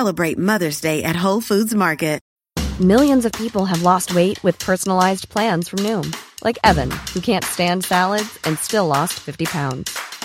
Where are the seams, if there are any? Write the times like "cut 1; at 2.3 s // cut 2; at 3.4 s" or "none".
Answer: cut 1; at 2.3 s